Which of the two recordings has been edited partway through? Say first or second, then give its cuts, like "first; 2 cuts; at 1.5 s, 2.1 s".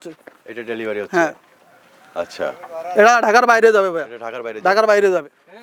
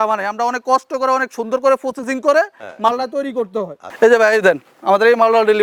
second; 1 cut; at 3.8 s